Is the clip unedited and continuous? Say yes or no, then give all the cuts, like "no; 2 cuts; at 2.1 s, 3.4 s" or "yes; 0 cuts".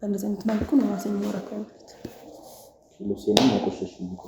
yes; 0 cuts